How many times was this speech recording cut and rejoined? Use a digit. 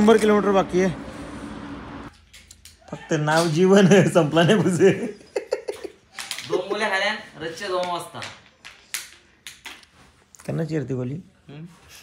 1